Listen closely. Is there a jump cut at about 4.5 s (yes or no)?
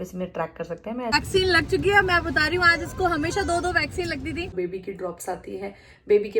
yes